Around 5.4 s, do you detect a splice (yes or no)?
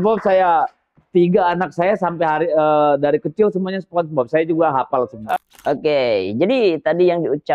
yes